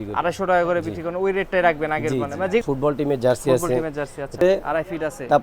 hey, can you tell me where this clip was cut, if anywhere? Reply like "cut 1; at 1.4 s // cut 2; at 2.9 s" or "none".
cut 1; at 2.6 s // cut 2; at 4.4 s